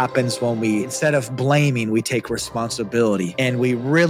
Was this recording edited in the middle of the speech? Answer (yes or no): yes